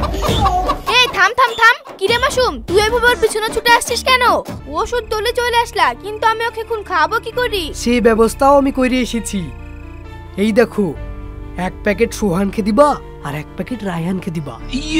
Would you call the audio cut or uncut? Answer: cut